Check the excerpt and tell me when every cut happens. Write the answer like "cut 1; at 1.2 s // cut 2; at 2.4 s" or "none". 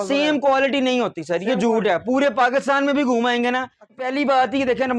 cut 1; at 4.0 s